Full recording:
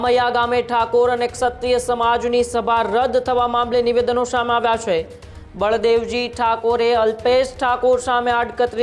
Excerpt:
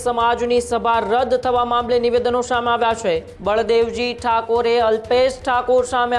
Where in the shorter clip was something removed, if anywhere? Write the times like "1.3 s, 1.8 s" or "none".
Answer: 3.3 s